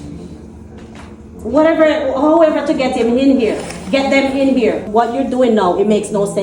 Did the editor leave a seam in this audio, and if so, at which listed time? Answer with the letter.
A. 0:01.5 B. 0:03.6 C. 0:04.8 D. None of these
C